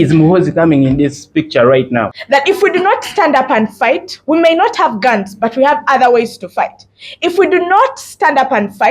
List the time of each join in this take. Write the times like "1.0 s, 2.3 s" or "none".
2.2 s